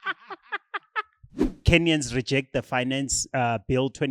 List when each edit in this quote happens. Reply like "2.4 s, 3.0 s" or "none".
1.5 s